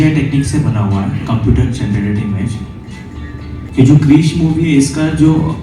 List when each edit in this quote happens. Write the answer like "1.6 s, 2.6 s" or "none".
3.6 s